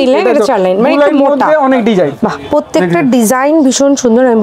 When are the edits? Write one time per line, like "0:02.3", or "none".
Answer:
0:02.2